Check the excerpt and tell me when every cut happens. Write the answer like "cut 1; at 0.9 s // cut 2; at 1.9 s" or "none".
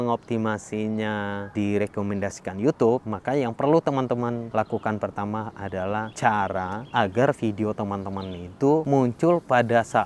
cut 1; at 1.5 s // cut 2; at 3.1 s // cut 3; at 4.5 s // cut 4; at 5.9 s // cut 5; at 6.8 s // cut 6; at 8.8 s